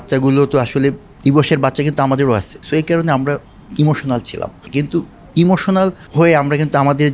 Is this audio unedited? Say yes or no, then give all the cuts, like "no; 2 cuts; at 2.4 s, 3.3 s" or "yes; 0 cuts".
no; 3 cuts; at 2.6 s, 4.6 s, 6.0 s